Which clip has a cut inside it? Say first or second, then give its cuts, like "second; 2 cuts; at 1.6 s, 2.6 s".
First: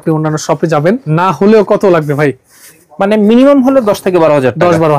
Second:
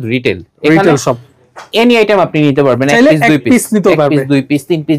first; 1 cut; at 1.0 s